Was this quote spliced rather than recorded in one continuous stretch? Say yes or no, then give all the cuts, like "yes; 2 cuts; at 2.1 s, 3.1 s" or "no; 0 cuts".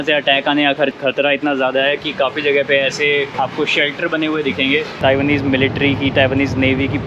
yes; 3 cuts; at 0.9 s, 3.3 s, 5.0 s